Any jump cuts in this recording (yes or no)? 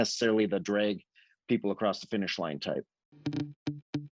yes